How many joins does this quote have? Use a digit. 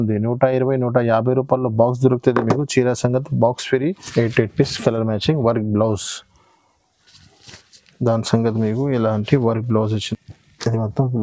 2